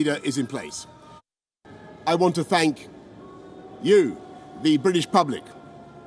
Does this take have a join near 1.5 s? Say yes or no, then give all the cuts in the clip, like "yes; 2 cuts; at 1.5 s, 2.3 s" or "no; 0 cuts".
yes; 1 cut; at 1.5 s